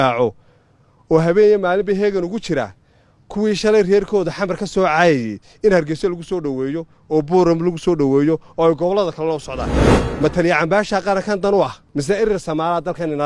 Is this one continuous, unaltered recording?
no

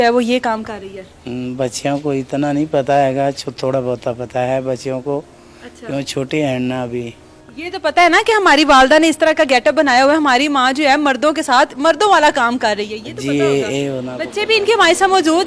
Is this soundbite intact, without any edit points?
yes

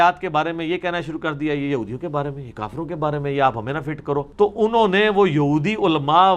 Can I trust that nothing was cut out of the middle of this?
yes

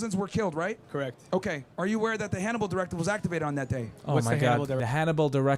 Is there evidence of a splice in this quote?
no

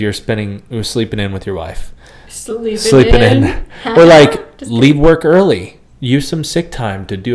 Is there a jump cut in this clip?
no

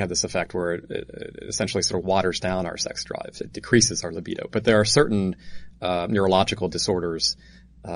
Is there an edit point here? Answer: no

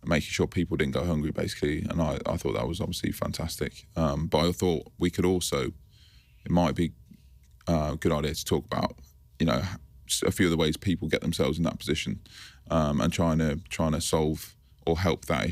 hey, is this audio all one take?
yes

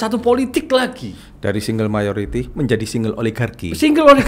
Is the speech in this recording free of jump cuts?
yes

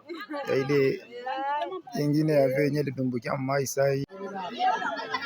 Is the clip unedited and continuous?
no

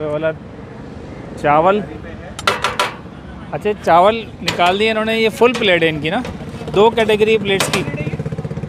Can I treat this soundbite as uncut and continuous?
yes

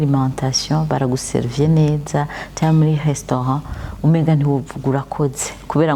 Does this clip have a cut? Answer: no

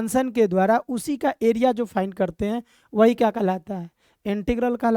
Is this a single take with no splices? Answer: yes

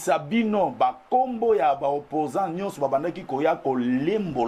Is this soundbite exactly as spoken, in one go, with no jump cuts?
yes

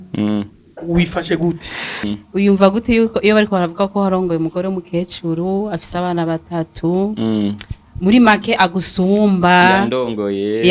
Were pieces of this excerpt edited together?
yes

